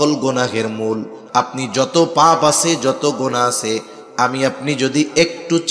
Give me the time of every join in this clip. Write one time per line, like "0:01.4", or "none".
0:01.1